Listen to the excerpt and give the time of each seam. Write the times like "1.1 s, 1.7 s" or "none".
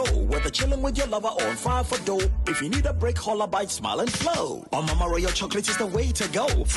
none